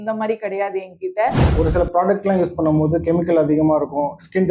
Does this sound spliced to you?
yes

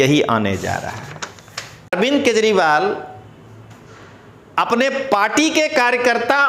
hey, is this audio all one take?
no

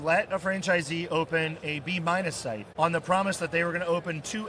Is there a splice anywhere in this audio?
yes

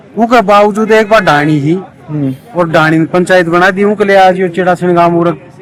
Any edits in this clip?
no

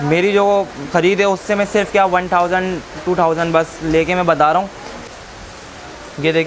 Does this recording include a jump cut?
yes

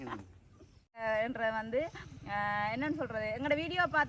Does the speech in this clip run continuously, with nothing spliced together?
no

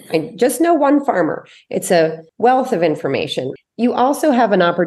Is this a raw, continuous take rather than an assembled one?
no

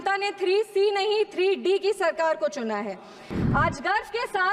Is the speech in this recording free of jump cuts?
no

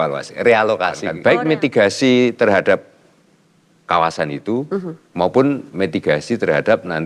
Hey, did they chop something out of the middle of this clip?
yes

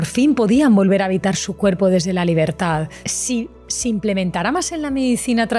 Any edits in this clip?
yes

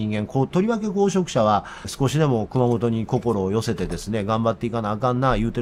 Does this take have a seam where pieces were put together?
no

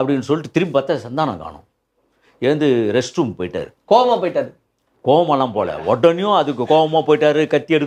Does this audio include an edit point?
no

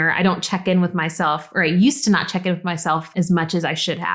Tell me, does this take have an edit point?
yes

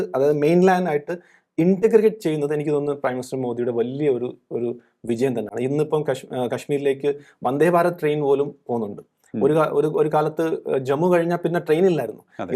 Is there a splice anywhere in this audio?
no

